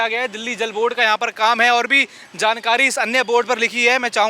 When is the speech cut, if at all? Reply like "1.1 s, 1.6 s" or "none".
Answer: none